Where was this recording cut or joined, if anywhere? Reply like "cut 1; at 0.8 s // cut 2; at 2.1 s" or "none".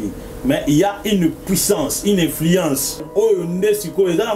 cut 1; at 3.1 s